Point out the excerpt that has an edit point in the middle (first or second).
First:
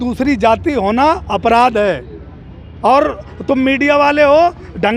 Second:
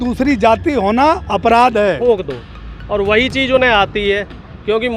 second